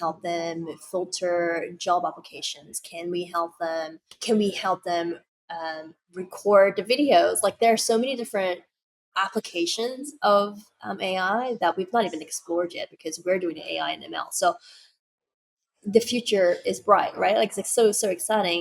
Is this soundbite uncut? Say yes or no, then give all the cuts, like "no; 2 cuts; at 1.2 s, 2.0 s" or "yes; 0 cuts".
no; 1 cut; at 4.2 s